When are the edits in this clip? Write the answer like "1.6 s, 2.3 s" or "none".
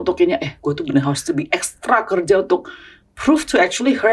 none